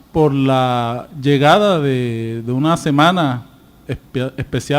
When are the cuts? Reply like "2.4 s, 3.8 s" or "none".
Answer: 2.4 s